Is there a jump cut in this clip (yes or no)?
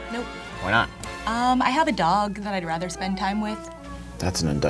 no